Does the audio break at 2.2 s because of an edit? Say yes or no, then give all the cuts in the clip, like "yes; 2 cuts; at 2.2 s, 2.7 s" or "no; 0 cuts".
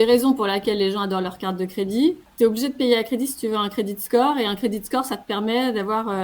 yes; 1 cut; at 2.2 s